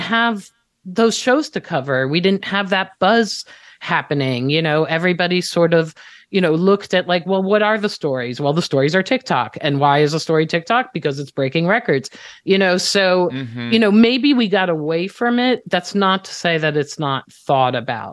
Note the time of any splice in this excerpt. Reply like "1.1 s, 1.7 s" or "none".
none